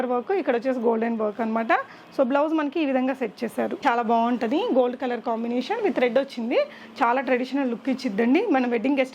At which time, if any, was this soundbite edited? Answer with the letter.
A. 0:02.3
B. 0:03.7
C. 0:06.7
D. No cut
B